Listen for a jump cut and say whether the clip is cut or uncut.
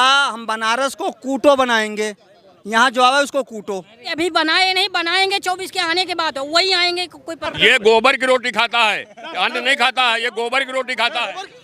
cut